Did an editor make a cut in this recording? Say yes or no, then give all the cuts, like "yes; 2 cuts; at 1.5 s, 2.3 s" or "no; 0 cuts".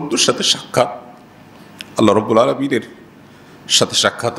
no; 0 cuts